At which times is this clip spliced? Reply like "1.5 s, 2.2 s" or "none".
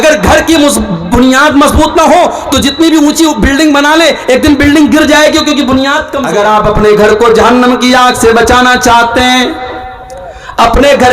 6.1 s